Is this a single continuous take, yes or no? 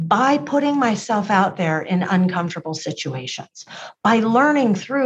yes